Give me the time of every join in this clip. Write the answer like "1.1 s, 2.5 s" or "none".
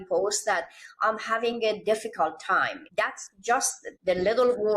2.8 s, 3.8 s

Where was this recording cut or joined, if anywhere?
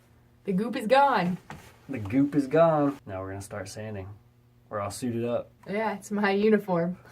3.0 s, 5.6 s

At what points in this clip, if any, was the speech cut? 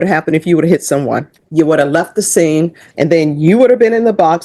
1.4 s, 2.8 s

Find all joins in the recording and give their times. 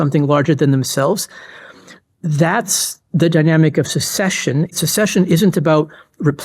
4.8 s

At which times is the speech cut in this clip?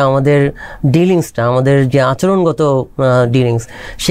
none

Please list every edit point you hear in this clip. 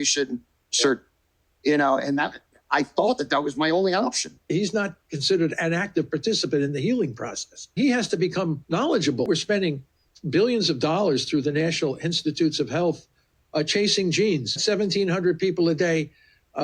4.5 s, 7.7 s, 9.3 s, 14.6 s

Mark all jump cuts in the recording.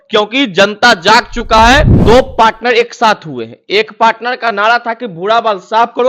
1.9 s

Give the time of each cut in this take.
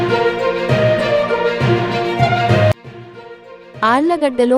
2.8 s

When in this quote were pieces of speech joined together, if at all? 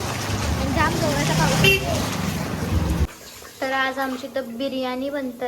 3.1 s

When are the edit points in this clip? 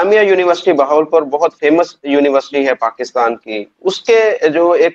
3.7 s

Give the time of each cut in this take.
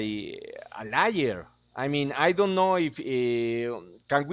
3.0 s

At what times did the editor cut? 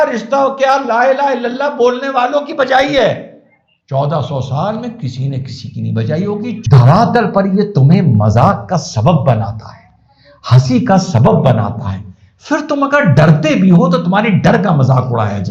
6.6 s

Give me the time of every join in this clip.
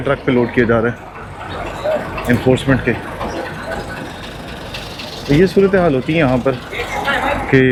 none

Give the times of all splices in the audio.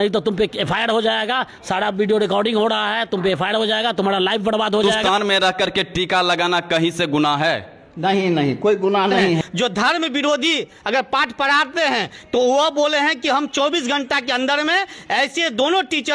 4.9 s, 9.4 s

